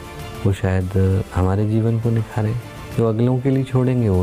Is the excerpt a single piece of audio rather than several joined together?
yes; 0 cuts

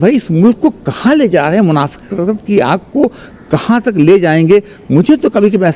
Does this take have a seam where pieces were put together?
no; 0 cuts

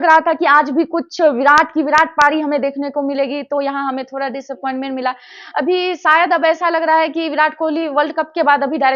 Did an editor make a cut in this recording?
no; 0 cuts

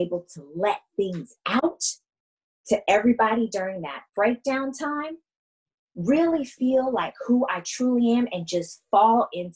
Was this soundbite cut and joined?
no; 0 cuts

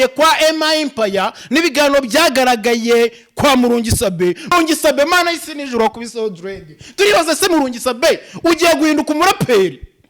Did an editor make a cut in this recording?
yes; 1 cut; at 4.5 s

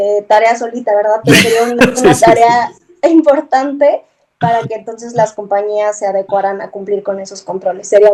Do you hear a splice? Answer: no; 0 cuts

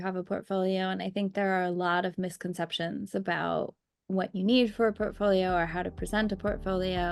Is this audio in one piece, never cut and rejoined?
yes; 0 cuts

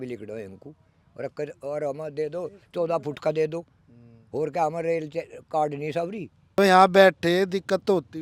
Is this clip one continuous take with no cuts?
no; 1 cut; at 6.6 s

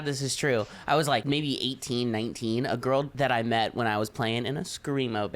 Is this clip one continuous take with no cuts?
no; 2 cuts; at 1.2 s, 3.1 s

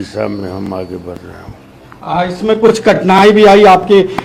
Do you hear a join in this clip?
no; 0 cuts

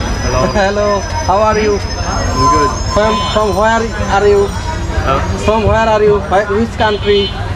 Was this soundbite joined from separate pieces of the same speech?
no; 0 cuts

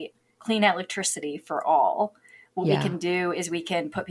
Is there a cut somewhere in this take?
no; 0 cuts

